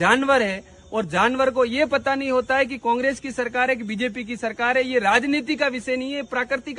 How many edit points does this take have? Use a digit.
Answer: 0